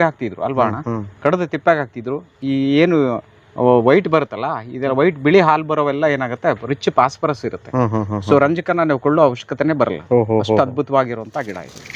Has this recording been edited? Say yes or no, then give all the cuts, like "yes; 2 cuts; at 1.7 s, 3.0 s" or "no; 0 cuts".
no; 0 cuts